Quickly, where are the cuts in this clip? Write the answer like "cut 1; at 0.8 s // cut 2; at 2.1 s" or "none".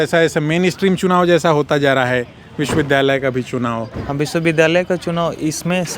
none